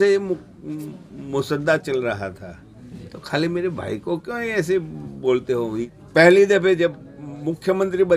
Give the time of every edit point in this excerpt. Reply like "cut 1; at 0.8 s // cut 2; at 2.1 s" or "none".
cut 1; at 5.9 s